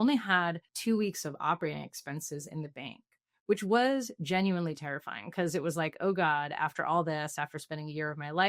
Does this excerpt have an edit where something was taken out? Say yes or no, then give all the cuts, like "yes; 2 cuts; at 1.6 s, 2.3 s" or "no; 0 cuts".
no; 0 cuts